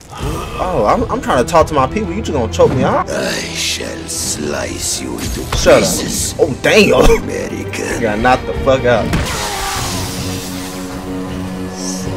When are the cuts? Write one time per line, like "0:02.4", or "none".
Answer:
0:03.0
0:09.3